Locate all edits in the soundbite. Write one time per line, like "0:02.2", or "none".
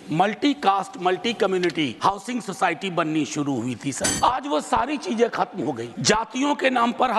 0:01.9
0:04.1
0:05.9